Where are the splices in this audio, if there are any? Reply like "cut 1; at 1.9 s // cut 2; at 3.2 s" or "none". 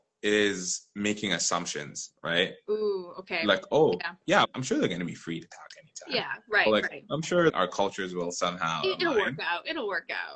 cut 1; at 4.5 s // cut 2; at 7.5 s